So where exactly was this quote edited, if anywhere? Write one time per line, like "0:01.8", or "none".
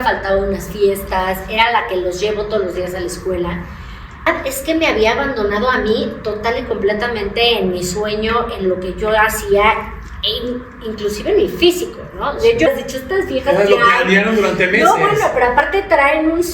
0:04.3
0:12.7